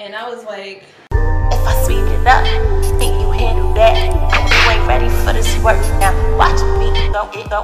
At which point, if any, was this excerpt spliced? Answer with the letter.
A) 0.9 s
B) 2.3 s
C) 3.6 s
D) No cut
A